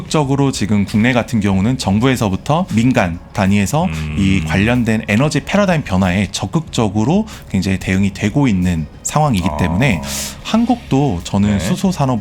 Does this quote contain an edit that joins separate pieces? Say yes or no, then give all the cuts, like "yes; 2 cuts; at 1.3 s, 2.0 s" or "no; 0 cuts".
yes; 2 cuts; at 2.7 s, 8.9 s